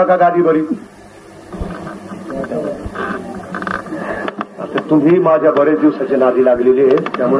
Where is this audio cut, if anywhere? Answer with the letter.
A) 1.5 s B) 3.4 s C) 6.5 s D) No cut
A